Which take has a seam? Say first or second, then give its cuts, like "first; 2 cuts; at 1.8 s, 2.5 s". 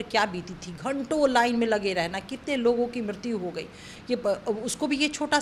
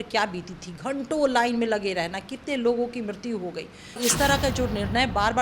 second; 1 cut; at 4.0 s